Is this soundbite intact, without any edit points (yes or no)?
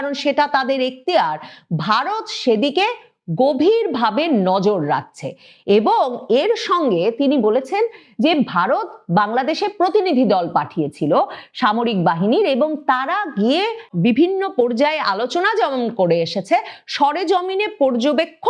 yes